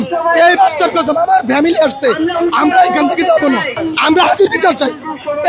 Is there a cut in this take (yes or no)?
yes